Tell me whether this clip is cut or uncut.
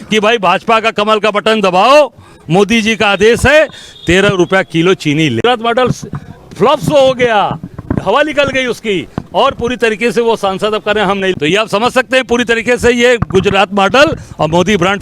cut